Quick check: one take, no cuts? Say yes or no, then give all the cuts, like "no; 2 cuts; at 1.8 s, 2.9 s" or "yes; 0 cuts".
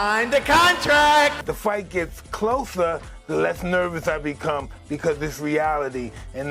yes; 0 cuts